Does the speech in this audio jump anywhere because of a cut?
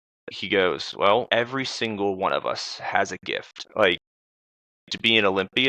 yes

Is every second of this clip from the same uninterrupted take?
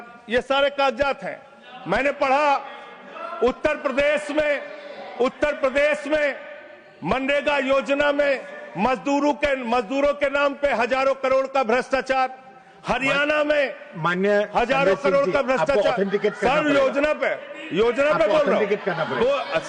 yes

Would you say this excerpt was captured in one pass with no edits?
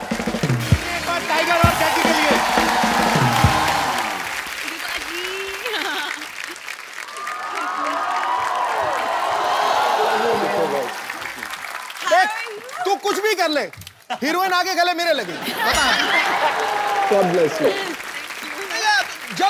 yes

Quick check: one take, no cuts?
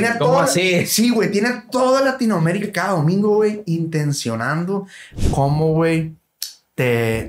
no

